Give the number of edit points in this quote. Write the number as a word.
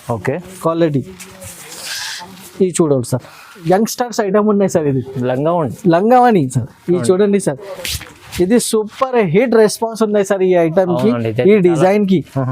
one